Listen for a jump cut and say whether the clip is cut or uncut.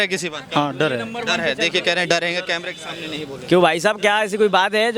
uncut